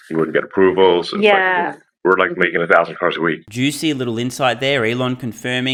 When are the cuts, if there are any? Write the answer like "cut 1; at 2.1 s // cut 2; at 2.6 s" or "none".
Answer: none